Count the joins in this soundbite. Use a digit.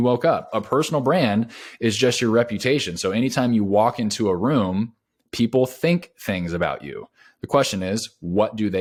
0